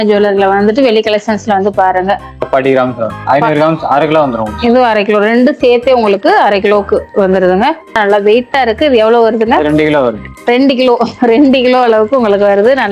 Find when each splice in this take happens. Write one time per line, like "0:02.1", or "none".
0:02.5
0:08.0